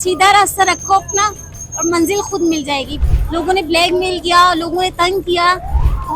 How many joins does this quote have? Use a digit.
1